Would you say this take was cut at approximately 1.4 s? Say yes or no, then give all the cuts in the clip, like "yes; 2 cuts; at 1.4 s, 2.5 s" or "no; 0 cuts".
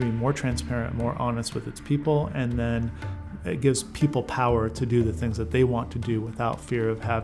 no; 0 cuts